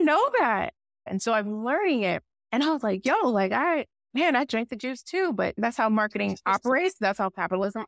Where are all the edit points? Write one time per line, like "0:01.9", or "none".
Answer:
0:01.1
0:02.3
0:04.0
0:05.6